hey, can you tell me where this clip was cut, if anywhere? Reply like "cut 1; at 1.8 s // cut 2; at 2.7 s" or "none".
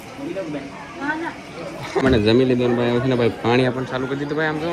cut 1; at 2.0 s